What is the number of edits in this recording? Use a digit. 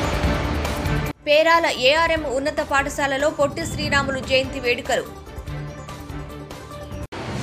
0